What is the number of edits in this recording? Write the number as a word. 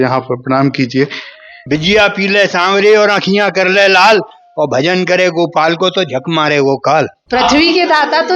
two